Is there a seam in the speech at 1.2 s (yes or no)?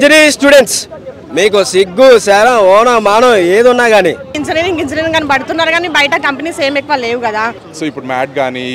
no